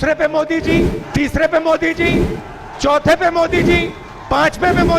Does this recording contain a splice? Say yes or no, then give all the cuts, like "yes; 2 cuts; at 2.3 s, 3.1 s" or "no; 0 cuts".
yes; 1 cut; at 1.0 s